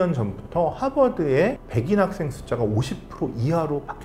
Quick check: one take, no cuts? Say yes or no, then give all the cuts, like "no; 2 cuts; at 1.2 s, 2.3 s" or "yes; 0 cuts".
yes; 0 cuts